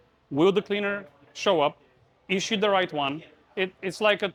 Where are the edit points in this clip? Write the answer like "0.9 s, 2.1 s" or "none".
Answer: none